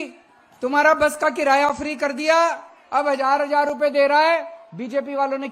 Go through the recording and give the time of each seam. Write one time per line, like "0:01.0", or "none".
none